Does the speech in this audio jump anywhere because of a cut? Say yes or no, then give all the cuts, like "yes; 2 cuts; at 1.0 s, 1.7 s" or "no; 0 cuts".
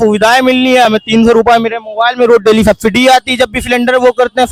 no; 0 cuts